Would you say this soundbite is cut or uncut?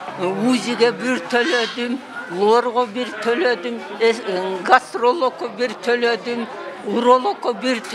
uncut